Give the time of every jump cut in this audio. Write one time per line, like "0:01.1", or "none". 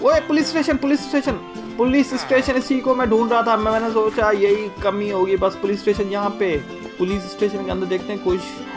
0:06.8